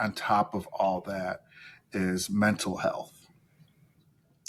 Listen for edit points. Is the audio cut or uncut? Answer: uncut